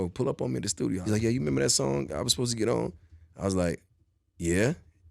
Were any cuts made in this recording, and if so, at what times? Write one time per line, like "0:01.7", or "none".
0:01.0